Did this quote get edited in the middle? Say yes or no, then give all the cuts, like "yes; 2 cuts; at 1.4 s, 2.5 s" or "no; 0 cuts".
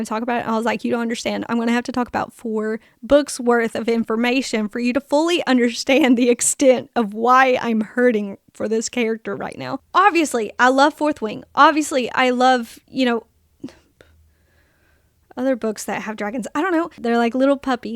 yes; 2 cuts; at 9.8 s, 17.0 s